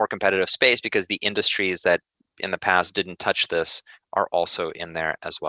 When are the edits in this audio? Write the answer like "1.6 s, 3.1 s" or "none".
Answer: none